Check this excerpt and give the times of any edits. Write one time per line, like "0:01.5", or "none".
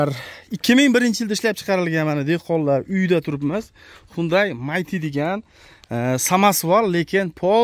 none